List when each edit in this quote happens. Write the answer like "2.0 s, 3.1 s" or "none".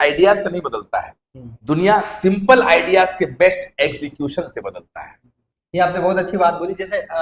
none